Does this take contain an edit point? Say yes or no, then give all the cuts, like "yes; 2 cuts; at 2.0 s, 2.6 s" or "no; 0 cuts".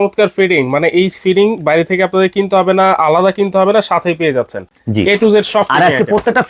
no; 0 cuts